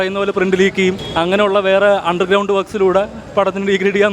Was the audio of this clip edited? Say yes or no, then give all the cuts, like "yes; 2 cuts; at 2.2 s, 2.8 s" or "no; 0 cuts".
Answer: yes; 1 cut; at 1.0 s